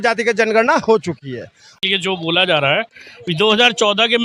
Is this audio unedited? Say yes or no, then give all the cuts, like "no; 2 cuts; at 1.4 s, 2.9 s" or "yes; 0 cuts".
no; 1 cut; at 1.7 s